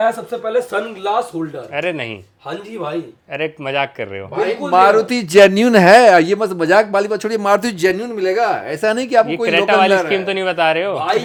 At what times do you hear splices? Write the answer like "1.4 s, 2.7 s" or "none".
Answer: none